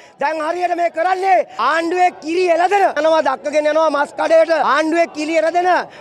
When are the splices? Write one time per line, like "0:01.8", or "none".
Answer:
0:01.5
0:03.0
0:04.6